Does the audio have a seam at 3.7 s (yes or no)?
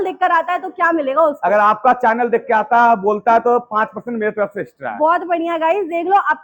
no